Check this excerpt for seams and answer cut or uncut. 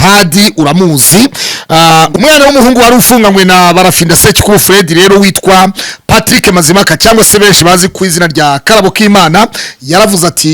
cut